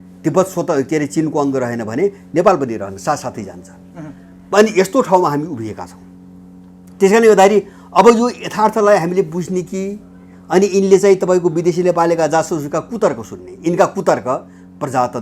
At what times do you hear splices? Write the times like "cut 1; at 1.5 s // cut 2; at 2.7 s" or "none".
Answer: none